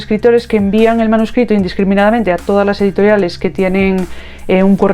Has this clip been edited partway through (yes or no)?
no